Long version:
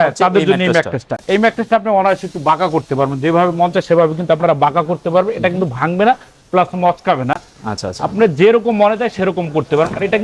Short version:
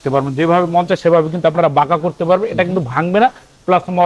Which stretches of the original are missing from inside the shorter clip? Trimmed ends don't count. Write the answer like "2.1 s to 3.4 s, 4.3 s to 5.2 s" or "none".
none